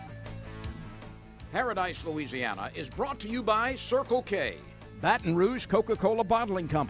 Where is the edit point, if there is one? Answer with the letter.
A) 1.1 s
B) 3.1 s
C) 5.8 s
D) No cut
A